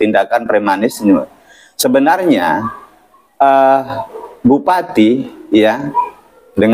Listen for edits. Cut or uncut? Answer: uncut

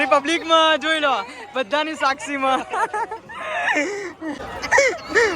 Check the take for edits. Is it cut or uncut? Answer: cut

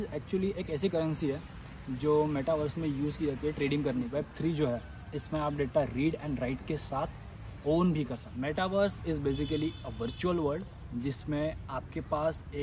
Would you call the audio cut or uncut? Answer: cut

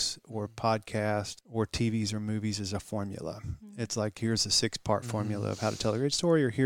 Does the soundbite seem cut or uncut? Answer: cut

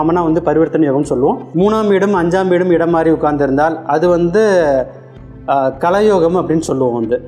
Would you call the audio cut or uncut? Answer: cut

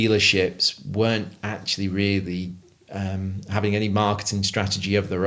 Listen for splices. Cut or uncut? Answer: uncut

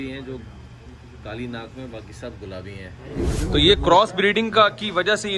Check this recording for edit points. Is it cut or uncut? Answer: cut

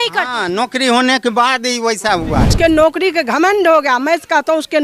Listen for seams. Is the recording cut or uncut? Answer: cut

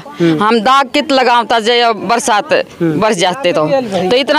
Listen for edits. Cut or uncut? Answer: uncut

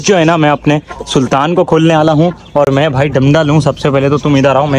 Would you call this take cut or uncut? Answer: uncut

